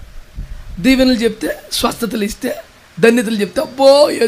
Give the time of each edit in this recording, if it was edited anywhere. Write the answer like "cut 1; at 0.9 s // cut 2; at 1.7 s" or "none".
none